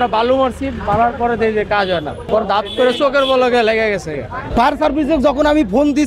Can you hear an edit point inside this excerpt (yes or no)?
yes